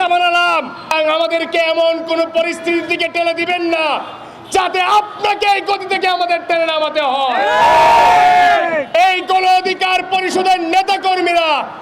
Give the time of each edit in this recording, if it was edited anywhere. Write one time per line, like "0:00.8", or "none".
0:00.9